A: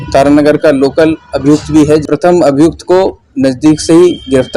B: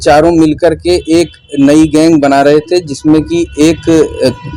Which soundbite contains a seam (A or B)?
A